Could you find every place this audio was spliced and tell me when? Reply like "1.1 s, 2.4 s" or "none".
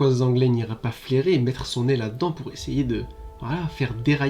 none